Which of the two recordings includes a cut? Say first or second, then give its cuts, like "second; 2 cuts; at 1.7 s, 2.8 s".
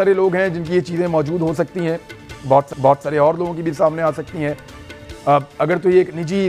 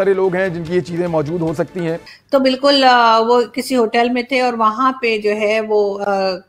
second; 1 cut; at 2.1 s